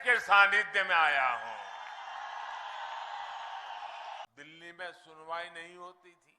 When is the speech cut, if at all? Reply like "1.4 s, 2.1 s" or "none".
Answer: 4.3 s